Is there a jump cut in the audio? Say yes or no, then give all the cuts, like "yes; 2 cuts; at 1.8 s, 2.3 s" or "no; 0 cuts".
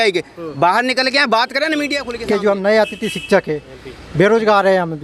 yes; 1 cut; at 2.1 s